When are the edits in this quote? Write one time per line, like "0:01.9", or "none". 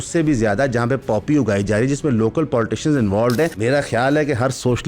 0:03.6